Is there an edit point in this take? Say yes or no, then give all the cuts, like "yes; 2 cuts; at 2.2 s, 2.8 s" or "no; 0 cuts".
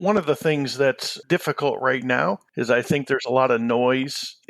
yes; 2 cuts; at 1.2 s, 2.5 s